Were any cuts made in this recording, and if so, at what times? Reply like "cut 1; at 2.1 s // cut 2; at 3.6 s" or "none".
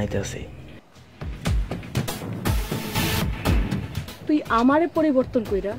cut 1; at 1.0 s